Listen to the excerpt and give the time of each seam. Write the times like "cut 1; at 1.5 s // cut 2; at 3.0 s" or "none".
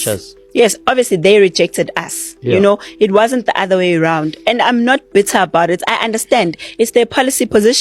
none